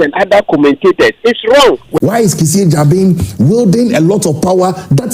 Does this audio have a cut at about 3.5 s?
no; 1 cut; at 2.0 s

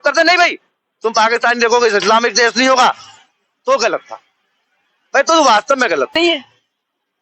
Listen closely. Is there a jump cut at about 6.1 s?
yes; 1 cut; at 6.1 s

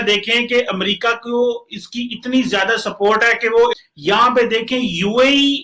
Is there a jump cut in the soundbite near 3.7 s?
yes; 1 cut; at 3.7 s

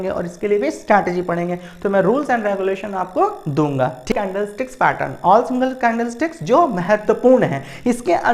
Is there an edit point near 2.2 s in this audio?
no; 1 cut; at 4.1 s

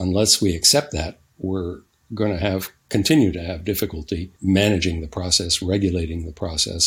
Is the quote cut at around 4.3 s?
yes; 1 cut; at 4.3 s

